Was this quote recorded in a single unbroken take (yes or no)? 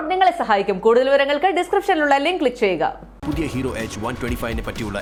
yes